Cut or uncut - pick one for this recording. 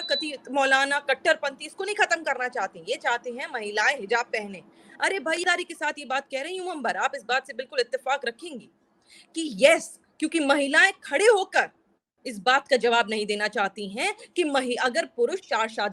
cut